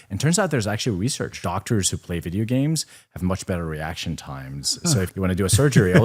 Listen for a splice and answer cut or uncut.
cut